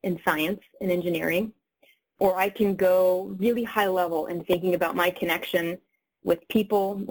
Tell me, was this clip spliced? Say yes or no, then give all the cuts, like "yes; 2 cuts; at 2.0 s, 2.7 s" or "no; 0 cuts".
yes; 1 cut; at 2.1 s